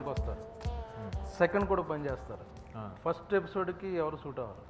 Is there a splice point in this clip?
no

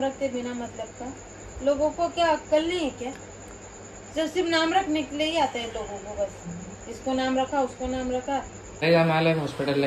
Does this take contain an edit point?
yes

